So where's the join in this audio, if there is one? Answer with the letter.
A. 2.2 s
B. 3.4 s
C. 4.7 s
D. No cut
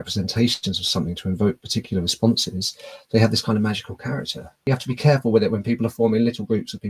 C